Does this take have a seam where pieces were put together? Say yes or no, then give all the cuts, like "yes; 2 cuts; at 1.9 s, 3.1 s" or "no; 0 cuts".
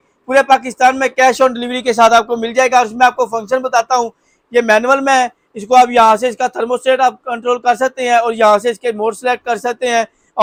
no; 0 cuts